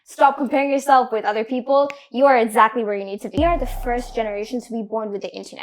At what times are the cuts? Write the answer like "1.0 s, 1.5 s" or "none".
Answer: 3.3 s